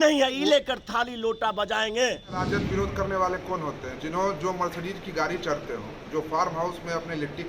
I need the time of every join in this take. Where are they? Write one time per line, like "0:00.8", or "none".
0:02.5